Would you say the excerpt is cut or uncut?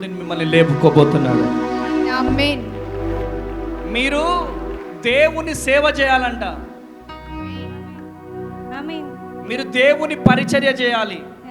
uncut